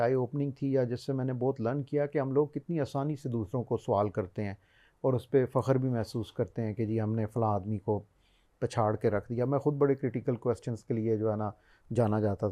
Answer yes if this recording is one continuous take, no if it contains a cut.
yes